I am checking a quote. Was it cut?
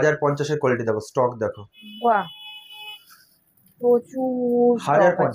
no; 0 cuts

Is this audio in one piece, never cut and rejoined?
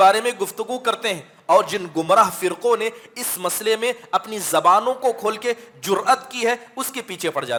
yes; 0 cuts

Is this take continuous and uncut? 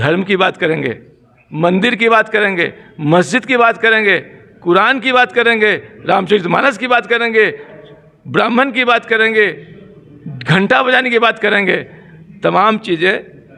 yes; 0 cuts

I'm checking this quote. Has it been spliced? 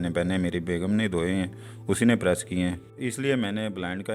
yes; 1 cut; at 2.9 s

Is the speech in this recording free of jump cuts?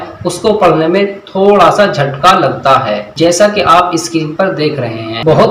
no; 1 cut; at 3.0 s

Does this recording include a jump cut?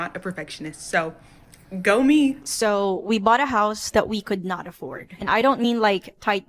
yes; 1 cut; at 2.4 s

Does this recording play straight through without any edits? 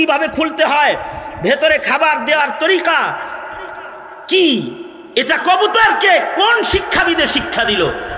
yes; 0 cuts

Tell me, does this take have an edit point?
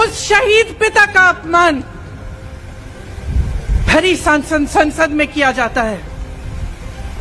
no; 0 cuts

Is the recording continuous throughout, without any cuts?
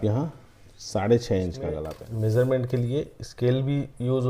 no; 1 cut; at 1.9 s

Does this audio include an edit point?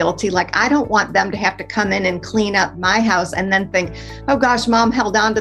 no; 0 cuts

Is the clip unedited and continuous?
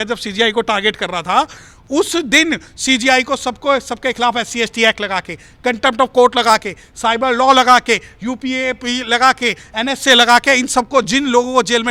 yes; 0 cuts

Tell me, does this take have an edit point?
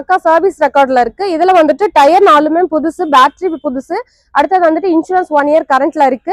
no; 0 cuts

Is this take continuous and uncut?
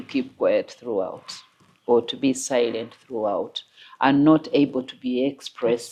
yes; 0 cuts

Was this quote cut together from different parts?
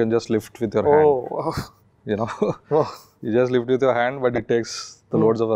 no; 0 cuts

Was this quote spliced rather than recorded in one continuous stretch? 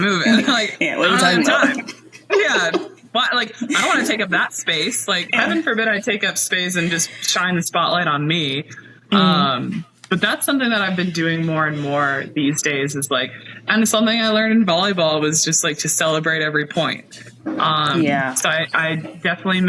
no; 0 cuts

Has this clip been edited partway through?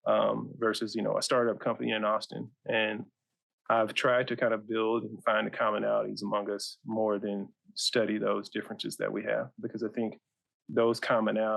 no; 0 cuts

